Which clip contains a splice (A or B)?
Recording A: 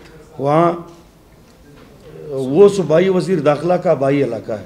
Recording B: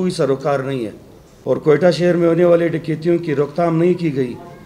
B